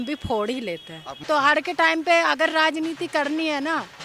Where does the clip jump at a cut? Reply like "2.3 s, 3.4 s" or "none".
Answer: 1.2 s